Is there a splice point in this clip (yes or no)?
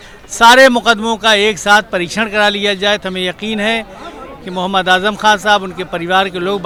no